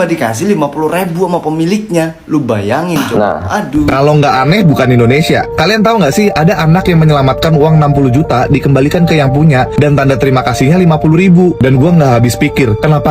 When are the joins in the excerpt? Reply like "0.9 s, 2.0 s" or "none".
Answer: 3.9 s